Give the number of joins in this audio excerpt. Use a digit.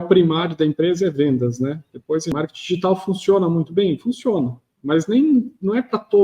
1